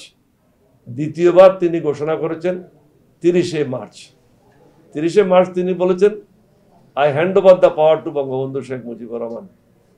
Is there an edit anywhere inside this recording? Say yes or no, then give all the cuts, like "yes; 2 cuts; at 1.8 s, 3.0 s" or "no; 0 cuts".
no; 0 cuts